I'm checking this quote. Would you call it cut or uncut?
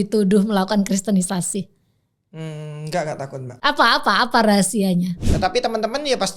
cut